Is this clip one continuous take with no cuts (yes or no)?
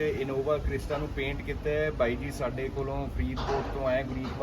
yes